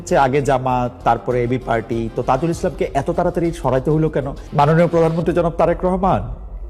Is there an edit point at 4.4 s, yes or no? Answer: yes